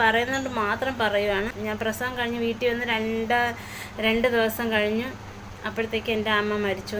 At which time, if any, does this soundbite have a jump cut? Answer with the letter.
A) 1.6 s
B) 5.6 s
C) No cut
A